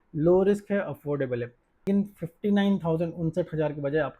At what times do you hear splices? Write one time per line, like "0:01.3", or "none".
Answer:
0:01.8